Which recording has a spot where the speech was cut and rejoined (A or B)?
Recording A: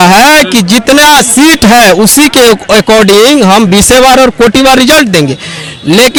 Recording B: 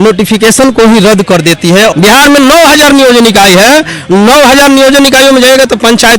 B